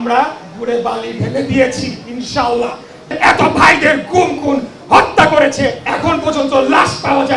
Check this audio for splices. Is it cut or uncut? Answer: cut